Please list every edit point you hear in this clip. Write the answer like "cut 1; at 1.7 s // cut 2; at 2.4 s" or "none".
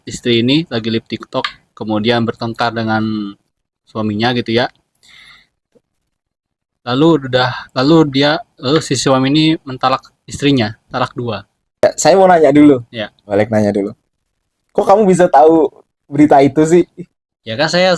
cut 1; at 11.8 s